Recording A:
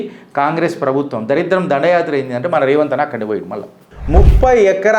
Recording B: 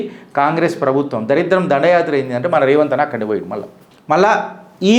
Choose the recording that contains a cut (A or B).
A